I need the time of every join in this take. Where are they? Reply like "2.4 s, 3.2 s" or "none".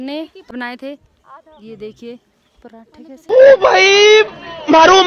none